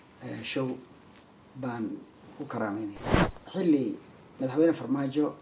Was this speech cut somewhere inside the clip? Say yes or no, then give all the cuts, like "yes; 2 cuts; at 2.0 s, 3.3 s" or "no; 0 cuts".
yes; 1 cut; at 3.3 s